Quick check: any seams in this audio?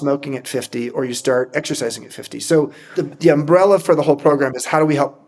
yes; 1 cut; at 2.8 s

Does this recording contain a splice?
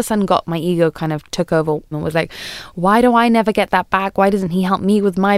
yes; 1 cut; at 1.9 s

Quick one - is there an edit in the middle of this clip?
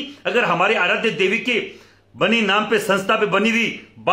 no; 0 cuts

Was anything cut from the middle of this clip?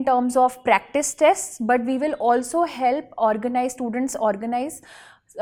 no; 0 cuts

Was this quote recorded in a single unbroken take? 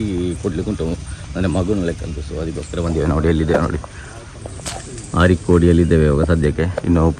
yes; 0 cuts

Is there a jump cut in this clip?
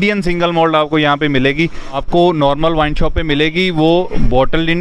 yes; 1 cut; at 2.0 s

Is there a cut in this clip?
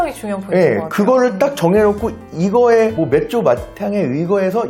no; 0 cuts

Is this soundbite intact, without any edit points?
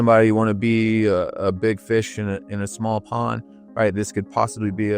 yes; 0 cuts

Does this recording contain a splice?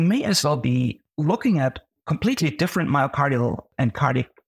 yes; 3 cuts; at 1.1 s, 1.9 s, 3.7 s

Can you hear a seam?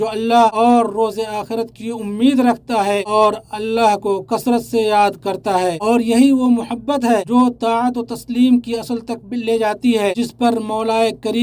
no; 0 cuts

